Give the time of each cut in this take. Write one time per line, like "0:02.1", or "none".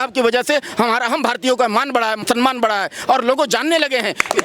0:02.2